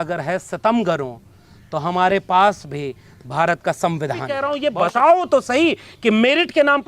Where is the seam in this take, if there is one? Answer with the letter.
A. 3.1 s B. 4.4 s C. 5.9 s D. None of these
B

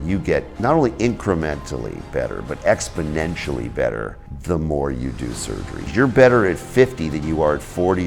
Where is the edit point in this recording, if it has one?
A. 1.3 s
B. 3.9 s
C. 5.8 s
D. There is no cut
C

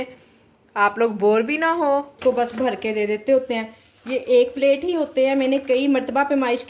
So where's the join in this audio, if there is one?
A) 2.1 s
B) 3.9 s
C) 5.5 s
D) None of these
A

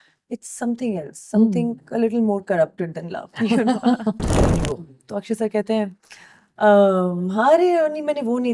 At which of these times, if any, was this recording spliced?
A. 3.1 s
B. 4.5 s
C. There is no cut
B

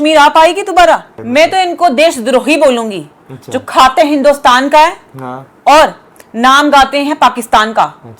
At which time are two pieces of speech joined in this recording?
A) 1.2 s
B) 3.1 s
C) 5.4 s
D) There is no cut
A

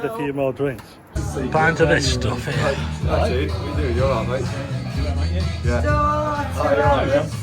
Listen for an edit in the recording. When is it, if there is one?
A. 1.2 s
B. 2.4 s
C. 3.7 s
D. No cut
A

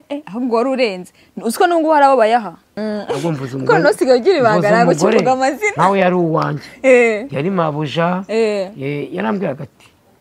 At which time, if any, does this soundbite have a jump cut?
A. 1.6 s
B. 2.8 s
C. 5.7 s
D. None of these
B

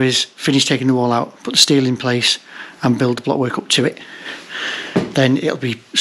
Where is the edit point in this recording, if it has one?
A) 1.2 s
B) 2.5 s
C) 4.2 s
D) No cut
D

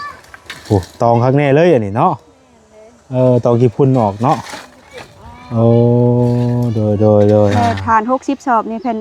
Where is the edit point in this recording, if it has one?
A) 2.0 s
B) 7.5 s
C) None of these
B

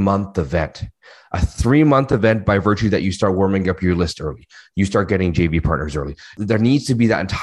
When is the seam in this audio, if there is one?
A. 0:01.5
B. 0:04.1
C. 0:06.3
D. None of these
C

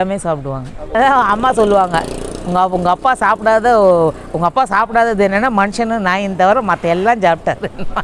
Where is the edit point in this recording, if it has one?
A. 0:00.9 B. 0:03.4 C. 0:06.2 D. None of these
A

